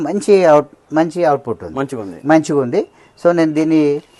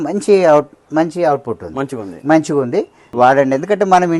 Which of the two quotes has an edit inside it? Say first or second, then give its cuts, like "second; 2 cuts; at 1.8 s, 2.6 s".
second; 1 cut; at 3.0 s